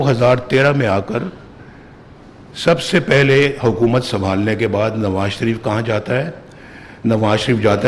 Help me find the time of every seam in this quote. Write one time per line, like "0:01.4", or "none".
none